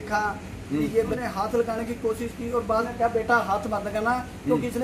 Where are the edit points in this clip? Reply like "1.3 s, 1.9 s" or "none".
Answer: 1.2 s, 2.9 s